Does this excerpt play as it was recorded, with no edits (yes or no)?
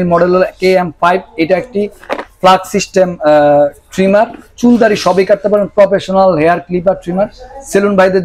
yes